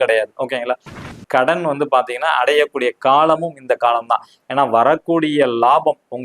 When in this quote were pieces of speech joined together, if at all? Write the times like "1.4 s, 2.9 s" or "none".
1.1 s